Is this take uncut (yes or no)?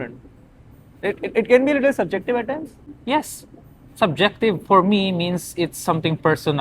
no